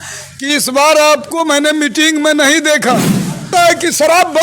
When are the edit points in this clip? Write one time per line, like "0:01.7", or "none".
0:03.5